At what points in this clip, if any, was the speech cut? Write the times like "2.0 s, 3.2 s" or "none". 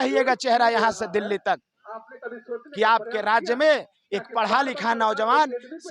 none